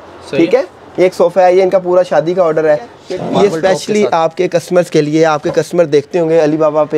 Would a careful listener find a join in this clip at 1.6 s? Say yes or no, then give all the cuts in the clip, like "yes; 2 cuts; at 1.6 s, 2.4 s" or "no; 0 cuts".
no; 1 cut; at 3.0 s